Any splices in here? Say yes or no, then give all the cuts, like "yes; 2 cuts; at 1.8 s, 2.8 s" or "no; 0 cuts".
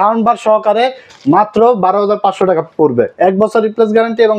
yes; 1 cut; at 3.1 s